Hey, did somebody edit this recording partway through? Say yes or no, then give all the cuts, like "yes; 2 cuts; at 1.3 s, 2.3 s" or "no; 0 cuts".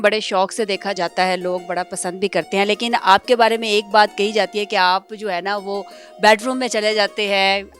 yes; 1 cut; at 0.9 s